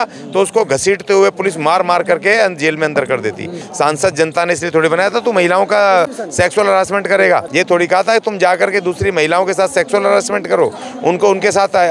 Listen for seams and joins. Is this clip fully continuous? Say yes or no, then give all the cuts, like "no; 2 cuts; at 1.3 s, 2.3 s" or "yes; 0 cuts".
no; 2 cuts; at 3.6 s, 7.5 s